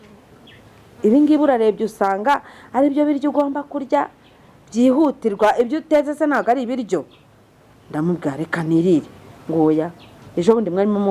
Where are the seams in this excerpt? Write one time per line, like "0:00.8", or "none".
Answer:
none